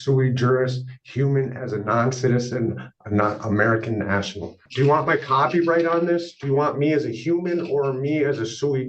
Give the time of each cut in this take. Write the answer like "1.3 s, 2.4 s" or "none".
4.7 s

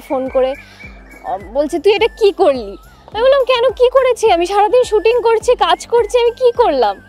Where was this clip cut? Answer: none

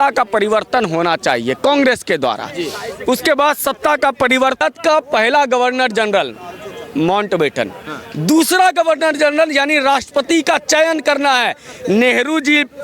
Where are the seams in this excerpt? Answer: 4.6 s

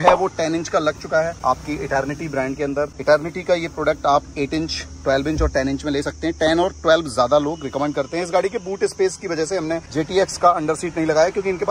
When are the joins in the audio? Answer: none

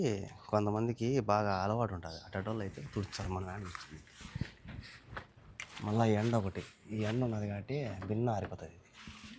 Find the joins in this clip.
5.6 s

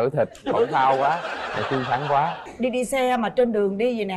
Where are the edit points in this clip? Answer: 2.4 s

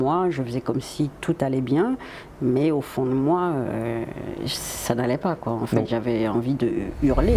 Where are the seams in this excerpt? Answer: none

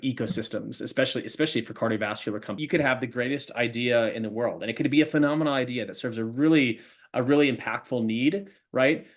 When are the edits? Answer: 2.6 s

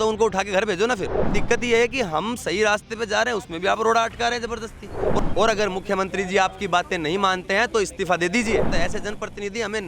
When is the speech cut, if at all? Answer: 1.4 s, 5.2 s, 8.7 s

